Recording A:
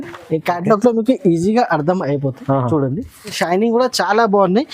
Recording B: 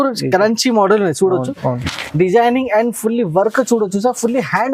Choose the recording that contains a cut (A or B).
A